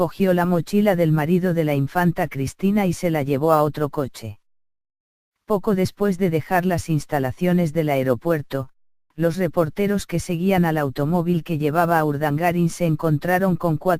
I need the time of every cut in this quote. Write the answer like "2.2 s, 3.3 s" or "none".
none